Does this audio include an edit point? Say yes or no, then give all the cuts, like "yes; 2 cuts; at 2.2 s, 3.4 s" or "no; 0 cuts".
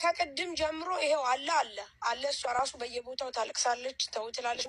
no; 0 cuts